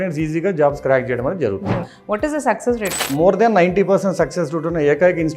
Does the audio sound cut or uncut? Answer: cut